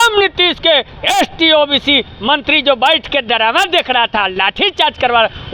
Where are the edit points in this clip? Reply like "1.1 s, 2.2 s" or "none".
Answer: none